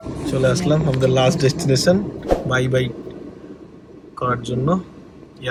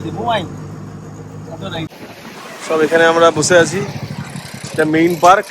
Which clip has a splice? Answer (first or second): second